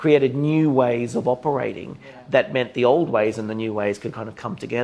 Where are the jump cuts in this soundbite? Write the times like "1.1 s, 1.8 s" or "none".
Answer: none